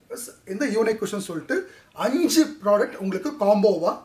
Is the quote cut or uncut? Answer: uncut